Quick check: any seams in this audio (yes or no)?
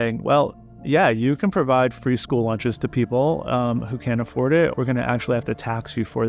yes